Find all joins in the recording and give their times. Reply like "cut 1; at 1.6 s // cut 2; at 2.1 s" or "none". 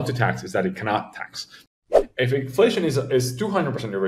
cut 1; at 1.8 s